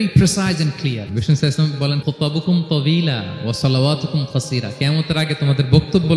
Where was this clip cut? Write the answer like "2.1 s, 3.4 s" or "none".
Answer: 1.1 s, 2.0 s